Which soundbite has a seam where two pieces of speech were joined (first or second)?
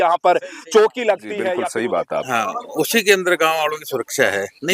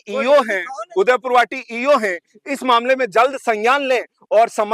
first